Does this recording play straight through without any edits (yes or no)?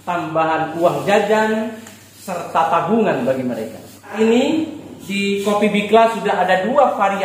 no